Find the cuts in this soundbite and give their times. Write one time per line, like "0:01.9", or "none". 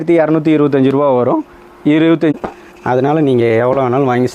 0:02.3